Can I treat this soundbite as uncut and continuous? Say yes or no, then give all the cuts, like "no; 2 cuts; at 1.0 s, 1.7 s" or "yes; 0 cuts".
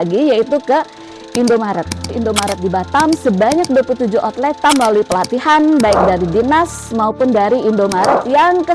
no; 2 cuts; at 2.2 s, 4.6 s